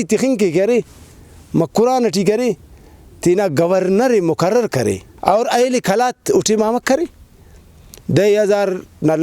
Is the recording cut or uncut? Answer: cut